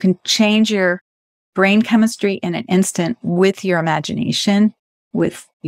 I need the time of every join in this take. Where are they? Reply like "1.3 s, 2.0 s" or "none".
none